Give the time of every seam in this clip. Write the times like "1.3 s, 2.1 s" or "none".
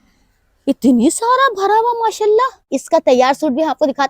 2.8 s